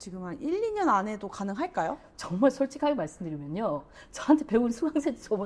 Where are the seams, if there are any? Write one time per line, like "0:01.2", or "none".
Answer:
none